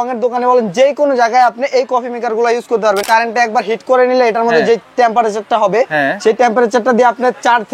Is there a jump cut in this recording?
yes; 1 cut; at 3.0 s

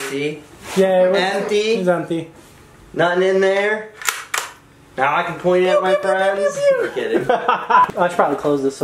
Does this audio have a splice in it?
yes; 1 cut; at 7.9 s

